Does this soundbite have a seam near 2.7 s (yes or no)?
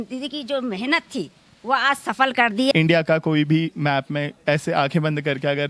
yes